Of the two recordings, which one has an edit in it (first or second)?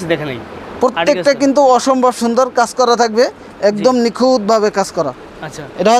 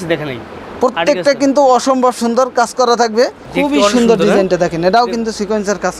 second